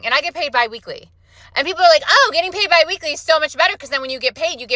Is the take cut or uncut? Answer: uncut